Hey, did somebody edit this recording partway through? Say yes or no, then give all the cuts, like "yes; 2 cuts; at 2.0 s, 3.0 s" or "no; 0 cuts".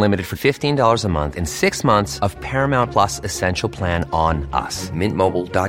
no; 0 cuts